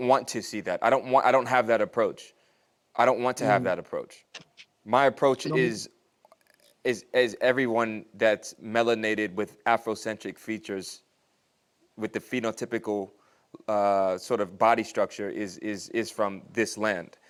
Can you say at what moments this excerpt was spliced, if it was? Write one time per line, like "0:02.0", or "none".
none

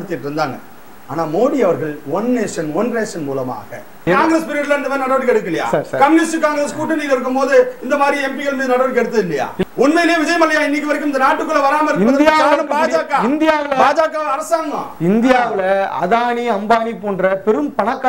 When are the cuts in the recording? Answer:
0:04.0
0:09.6

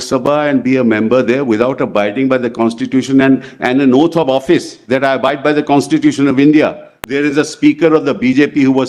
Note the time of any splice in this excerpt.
0:07.0

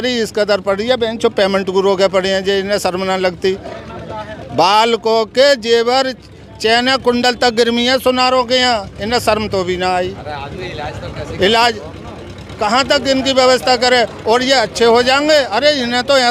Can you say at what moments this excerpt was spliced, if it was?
none

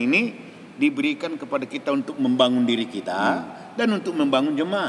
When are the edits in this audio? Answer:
none

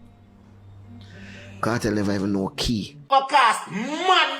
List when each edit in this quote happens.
0:02.9

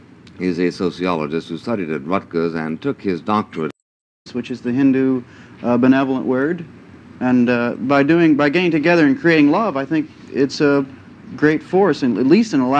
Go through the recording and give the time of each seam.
0:04.3

